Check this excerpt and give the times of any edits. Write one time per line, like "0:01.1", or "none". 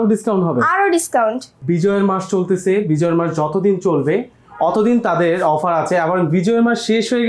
0:01.5